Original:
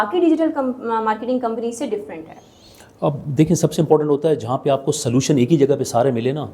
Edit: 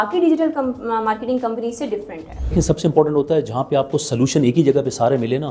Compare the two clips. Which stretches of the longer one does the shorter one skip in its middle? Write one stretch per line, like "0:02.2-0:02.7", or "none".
0:02.5-0:03.5

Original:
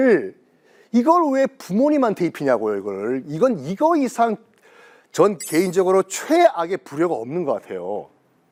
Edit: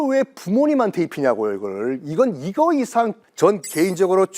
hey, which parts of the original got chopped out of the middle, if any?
0:04.5-0:05.0

